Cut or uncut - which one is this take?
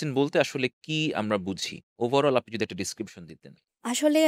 uncut